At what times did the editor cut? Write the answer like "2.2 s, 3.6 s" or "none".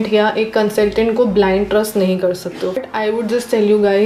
none